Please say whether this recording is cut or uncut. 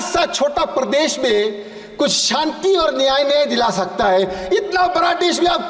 uncut